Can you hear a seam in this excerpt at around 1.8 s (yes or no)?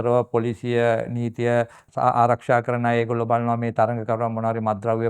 yes